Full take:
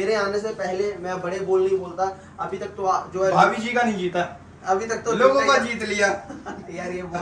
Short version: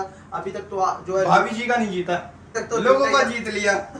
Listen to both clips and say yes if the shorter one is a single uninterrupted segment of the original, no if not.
no